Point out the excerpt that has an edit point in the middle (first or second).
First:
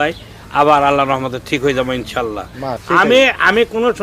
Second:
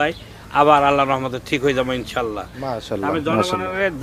first